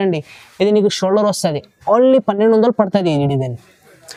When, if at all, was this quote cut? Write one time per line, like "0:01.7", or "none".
none